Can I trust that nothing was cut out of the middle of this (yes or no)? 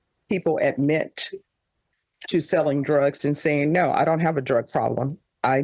yes